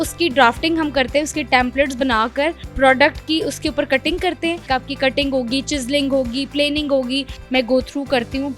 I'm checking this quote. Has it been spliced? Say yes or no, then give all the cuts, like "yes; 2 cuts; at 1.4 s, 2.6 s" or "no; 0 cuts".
yes; 2 cuts; at 4.6 s, 7.3 s